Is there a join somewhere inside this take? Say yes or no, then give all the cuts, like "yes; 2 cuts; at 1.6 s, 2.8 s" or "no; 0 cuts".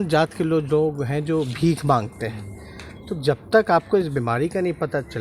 no; 0 cuts